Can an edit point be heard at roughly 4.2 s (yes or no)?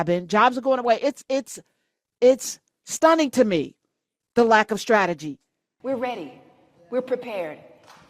no